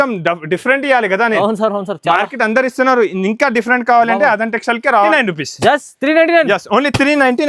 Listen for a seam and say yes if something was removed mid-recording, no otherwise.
yes